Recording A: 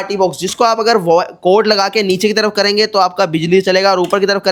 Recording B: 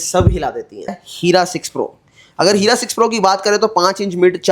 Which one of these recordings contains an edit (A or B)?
B